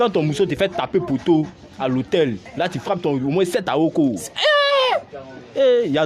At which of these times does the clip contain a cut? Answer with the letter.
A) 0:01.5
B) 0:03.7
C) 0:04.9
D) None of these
C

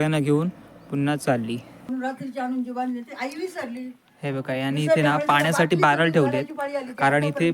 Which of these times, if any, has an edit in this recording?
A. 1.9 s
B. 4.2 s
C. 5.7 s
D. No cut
A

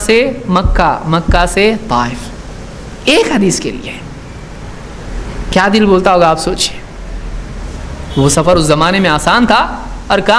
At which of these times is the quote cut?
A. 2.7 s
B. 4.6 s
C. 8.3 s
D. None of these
D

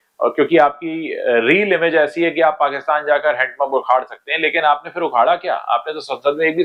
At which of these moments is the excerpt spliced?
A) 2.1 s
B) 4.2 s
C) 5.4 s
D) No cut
D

